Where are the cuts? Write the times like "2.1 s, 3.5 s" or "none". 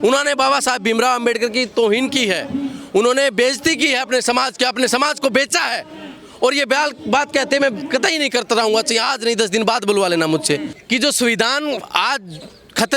10.7 s

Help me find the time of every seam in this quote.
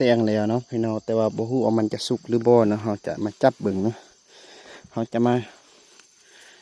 none

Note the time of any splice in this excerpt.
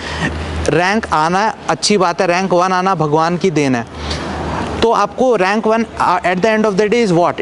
none

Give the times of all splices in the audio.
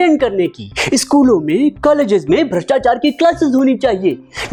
none

